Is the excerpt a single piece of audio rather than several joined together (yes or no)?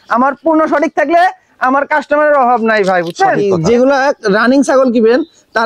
no